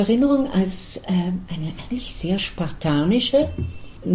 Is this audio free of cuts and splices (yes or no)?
yes